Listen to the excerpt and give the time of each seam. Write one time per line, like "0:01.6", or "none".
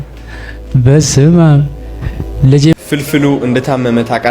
0:02.7